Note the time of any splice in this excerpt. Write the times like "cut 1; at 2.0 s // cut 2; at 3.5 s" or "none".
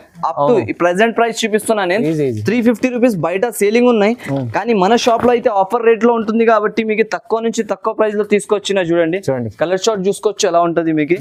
none